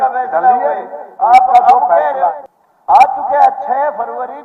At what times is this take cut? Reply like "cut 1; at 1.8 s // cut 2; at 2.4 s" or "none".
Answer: cut 1; at 2.3 s